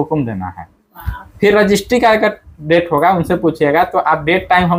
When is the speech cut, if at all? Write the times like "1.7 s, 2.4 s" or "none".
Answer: none